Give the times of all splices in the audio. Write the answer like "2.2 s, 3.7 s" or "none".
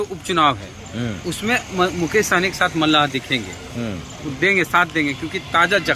none